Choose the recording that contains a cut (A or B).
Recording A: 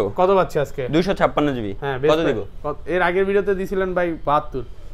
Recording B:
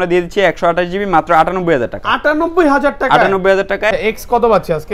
B